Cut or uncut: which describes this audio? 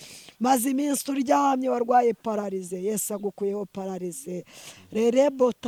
uncut